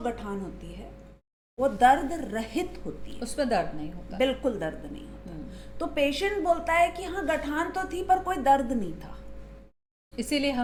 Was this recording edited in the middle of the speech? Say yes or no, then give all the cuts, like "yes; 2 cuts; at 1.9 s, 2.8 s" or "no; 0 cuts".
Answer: no; 0 cuts